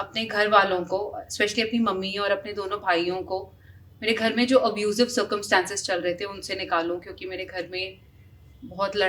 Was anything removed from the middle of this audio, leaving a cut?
no; 0 cuts

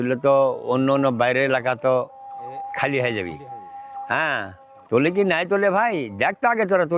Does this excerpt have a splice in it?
no; 0 cuts

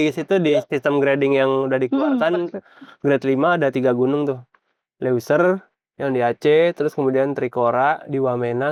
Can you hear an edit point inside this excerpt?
no; 0 cuts

